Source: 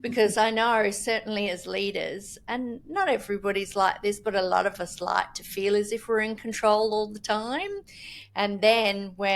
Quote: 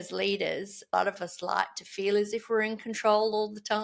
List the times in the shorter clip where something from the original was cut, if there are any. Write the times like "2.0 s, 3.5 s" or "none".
0.9 s